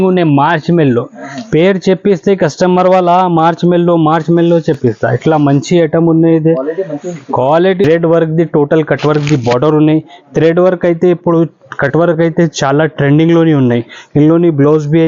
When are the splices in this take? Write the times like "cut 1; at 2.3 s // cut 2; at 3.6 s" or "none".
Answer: cut 1; at 7.8 s